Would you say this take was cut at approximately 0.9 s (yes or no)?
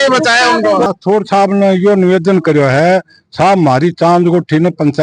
yes